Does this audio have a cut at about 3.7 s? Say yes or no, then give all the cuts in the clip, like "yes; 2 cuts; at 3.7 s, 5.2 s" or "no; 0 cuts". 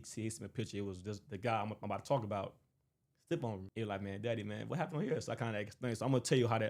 yes; 1 cut; at 3.7 s